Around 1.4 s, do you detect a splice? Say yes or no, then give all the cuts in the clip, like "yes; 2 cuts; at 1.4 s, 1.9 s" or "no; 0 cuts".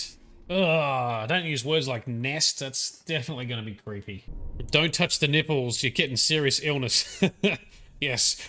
no; 1 cut; at 4.3 s